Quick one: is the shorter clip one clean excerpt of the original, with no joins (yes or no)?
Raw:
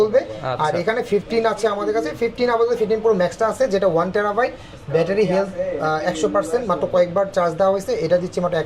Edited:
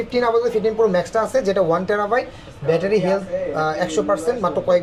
yes